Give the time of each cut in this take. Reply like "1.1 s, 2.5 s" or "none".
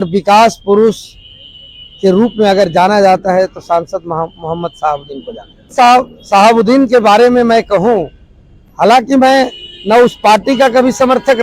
5.7 s